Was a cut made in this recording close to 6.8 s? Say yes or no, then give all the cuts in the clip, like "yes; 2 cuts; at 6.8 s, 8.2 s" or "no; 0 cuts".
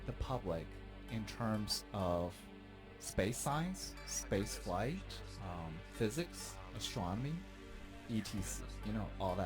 yes; 1 cut; at 6.8 s